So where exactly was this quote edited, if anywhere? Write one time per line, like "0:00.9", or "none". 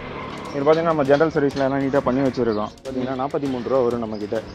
0:02.9